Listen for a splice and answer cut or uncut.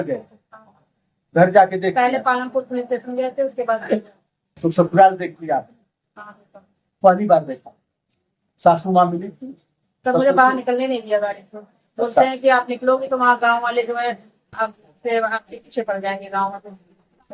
uncut